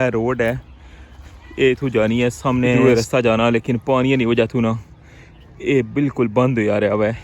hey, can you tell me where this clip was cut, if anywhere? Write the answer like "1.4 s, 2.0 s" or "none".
2.8 s